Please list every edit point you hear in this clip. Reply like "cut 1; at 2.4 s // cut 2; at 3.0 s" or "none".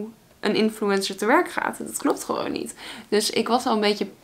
none